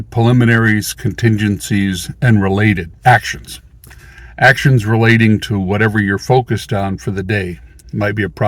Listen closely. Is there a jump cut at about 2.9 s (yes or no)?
yes